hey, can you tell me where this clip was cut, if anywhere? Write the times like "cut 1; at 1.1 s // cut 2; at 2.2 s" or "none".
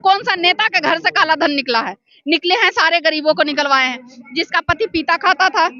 none